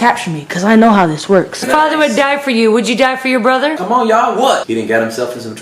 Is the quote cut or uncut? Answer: cut